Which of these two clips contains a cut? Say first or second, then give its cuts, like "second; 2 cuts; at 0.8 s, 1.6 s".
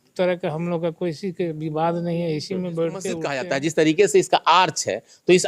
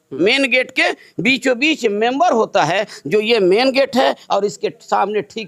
first; 1 cut; at 3.4 s